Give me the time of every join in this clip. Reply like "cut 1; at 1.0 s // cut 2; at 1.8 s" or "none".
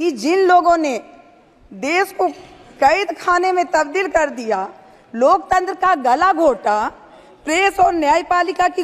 none